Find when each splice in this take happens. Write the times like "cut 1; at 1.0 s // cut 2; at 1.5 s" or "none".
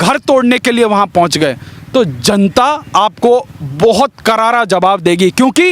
none